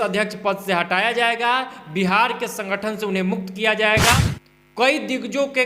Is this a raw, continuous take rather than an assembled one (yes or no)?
no